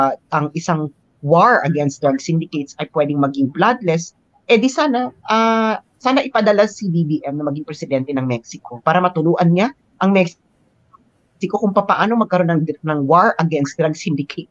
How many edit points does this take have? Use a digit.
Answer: 0